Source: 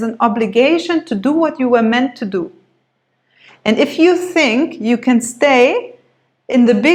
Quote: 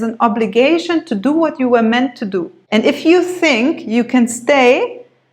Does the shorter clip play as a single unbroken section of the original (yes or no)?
no